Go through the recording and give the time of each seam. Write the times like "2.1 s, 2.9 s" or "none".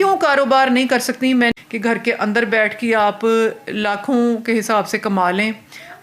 1.5 s